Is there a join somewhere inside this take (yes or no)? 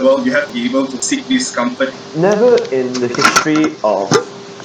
yes